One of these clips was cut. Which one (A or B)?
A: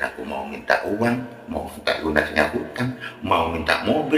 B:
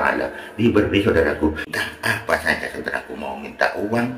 B